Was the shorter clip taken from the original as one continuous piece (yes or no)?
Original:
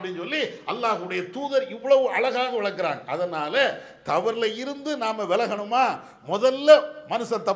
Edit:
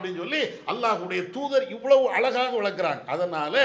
yes